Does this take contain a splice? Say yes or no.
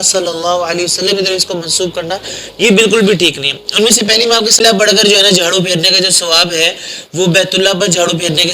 yes